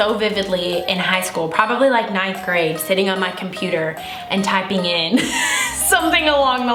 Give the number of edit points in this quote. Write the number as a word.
zero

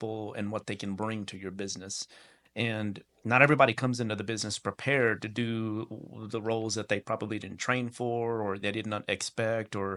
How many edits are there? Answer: zero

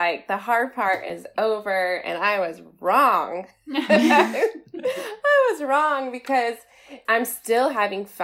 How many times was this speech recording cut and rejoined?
one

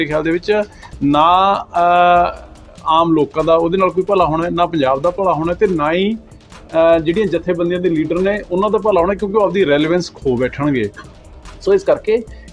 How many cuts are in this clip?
zero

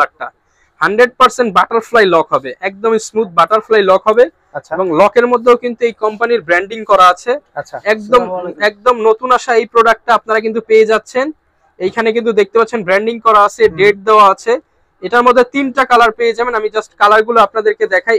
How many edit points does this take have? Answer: zero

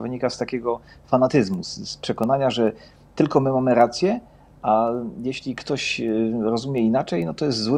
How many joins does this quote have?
zero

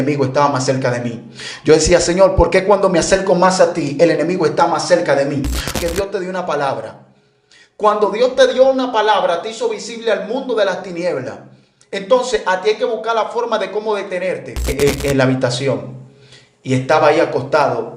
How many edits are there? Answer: two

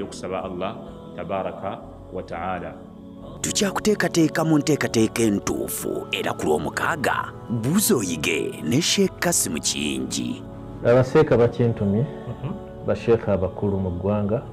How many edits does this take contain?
one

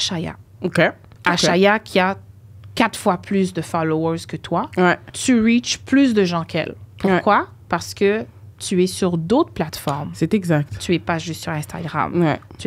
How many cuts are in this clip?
two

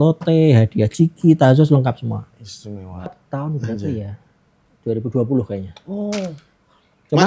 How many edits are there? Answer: one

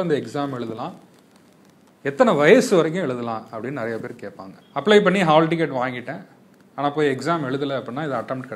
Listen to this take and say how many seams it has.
one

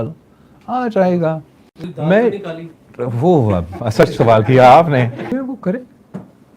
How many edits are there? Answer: one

